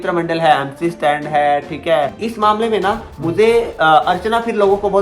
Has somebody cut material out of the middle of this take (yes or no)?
yes